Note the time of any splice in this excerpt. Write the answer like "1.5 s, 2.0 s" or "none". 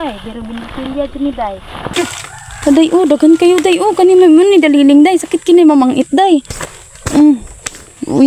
1.9 s